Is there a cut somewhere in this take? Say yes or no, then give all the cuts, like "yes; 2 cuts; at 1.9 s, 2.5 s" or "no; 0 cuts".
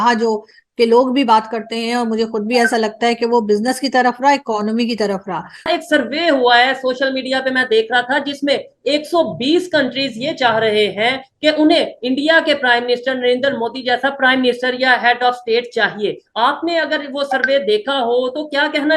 yes; 1 cut; at 5.7 s